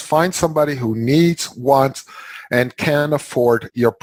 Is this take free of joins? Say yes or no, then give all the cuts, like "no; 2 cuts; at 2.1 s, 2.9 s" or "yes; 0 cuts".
yes; 0 cuts